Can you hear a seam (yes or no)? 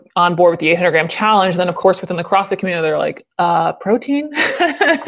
yes